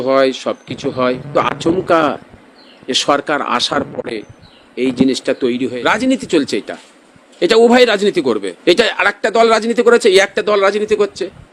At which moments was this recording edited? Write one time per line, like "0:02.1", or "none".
0:01.3
0:05.6
0:08.5